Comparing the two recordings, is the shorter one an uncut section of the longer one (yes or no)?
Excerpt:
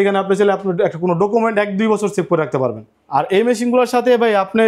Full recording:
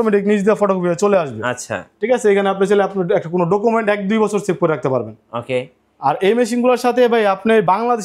no